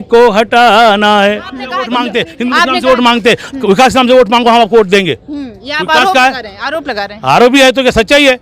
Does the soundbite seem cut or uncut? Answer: cut